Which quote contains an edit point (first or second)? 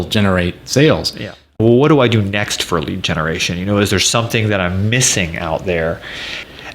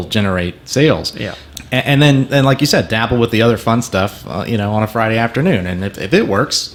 first